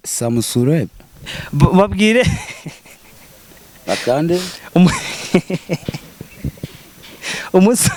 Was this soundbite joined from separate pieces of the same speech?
no; 0 cuts

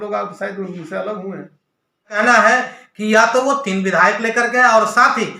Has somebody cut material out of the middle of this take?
yes; 1 cut; at 2.2 s

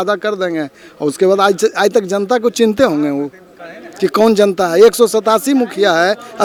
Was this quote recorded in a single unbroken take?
yes; 0 cuts

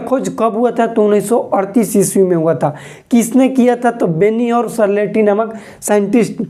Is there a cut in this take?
no; 0 cuts

